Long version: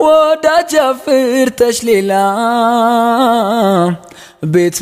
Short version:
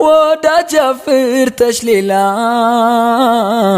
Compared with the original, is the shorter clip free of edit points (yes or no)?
yes